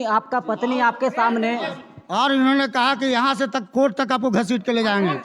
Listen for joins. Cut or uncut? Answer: uncut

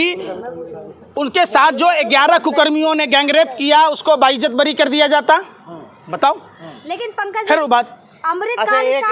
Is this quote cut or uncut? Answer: uncut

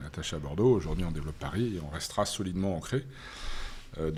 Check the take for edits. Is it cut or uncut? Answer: uncut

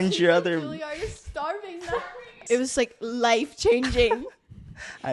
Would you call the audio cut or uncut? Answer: cut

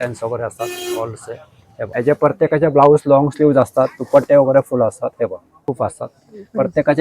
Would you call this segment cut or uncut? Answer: cut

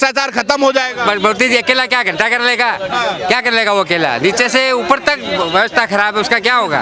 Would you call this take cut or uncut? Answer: uncut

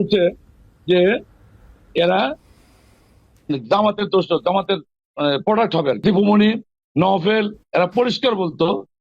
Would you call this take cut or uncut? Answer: cut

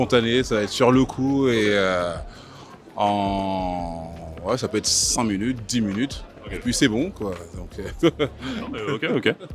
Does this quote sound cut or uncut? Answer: uncut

